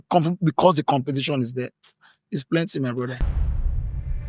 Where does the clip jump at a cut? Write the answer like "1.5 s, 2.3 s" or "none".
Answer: 3.2 s